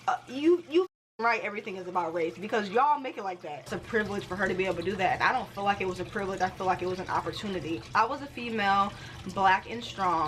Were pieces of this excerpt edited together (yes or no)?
yes